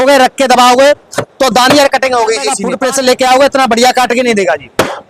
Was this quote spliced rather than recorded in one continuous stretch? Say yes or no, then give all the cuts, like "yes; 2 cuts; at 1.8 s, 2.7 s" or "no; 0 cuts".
no; 0 cuts